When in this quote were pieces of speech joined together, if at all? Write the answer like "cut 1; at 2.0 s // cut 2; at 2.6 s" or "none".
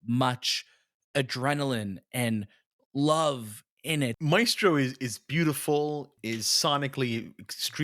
cut 1; at 4.2 s // cut 2; at 6.1 s